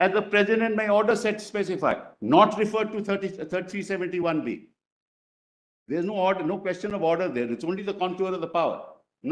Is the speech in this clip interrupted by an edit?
no; 0 cuts

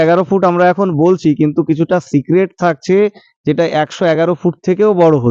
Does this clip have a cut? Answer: no; 0 cuts

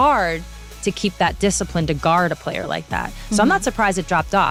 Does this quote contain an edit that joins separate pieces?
no; 0 cuts

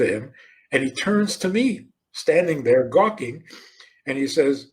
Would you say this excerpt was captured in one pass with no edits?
yes; 0 cuts

